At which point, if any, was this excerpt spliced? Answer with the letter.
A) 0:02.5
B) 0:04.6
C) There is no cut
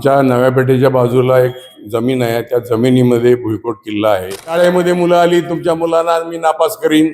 B